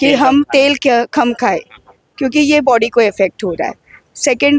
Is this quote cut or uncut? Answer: uncut